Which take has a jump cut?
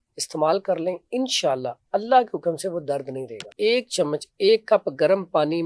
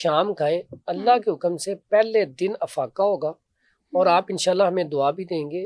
first; 1 cut; at 3.5 s

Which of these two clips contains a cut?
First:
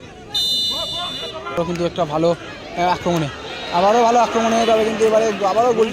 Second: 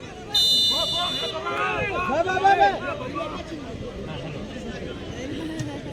first; 1 cut; at 1.6 s

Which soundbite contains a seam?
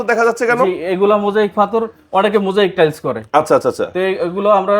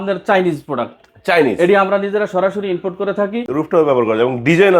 second; 1 cut; at 3.4 s

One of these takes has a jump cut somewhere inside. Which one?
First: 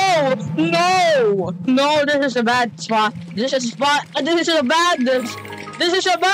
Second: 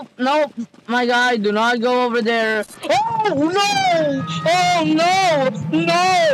second; 1 cut; at 2.7 s

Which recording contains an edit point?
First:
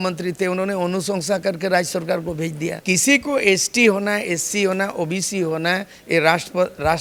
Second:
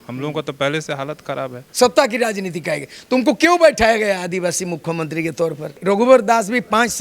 second; 2 cuts; at 1.6 s, 5.7 s

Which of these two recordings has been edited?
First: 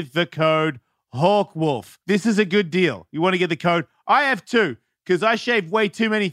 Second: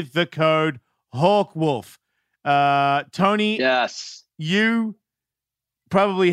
first; 1 cut; at 1.9 s

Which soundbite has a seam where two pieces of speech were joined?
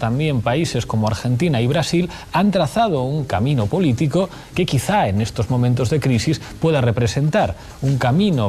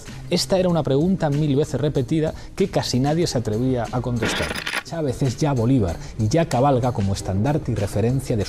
first; 1 cut; at 1.7 s

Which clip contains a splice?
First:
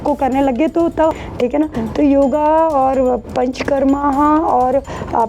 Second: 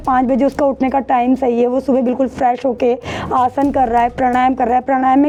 first; 1 cut; at 1.1 s

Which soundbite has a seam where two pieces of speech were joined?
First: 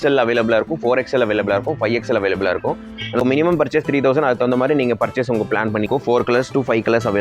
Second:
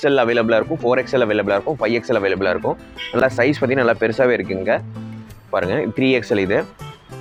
first; 2 cuts; at 3.2 s, 5.9 s

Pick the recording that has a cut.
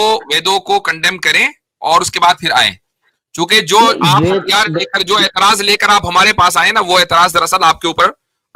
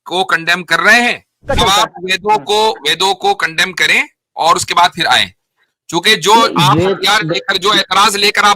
second; 1 cut; at 1.5 s

